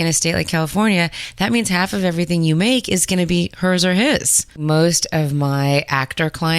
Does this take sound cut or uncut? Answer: cut